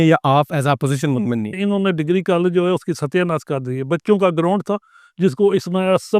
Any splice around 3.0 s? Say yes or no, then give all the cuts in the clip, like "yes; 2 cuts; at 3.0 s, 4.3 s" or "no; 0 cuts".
no; 1 cut; at 1.5 s